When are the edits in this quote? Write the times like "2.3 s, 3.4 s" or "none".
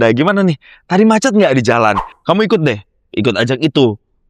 2.1 s